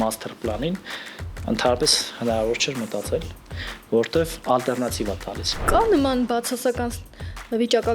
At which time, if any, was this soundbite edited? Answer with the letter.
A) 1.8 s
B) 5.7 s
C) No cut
B